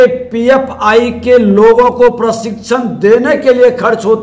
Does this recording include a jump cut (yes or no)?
no